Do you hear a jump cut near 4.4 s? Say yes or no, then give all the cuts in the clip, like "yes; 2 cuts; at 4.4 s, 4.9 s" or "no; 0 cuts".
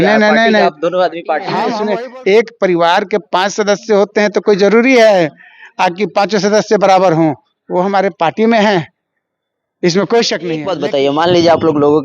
no; 2 cuts; at 1.7 s, 10.6 s